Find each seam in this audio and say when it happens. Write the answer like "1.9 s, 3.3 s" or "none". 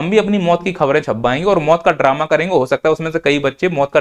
none